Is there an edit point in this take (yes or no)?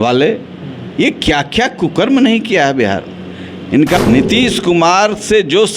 yes